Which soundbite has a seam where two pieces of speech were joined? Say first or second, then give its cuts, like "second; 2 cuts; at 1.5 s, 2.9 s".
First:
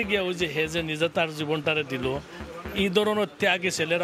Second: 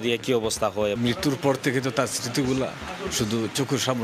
second; 1 cut; at 1.0 s